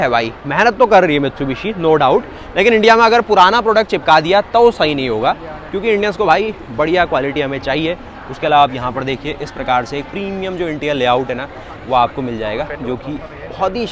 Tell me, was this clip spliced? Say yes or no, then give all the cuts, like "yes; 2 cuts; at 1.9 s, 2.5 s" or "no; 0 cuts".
no; 0 cuts